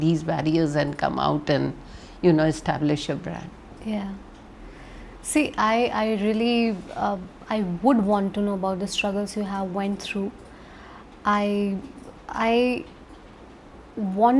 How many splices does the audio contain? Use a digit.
0